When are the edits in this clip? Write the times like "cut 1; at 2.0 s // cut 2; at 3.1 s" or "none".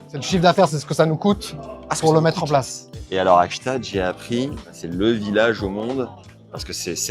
none